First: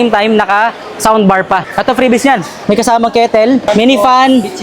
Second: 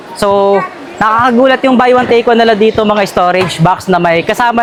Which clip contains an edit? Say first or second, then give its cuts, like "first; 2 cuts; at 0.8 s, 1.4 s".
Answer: first; 3 cuts; at 1.7 s, 2.5 s, 3.7 s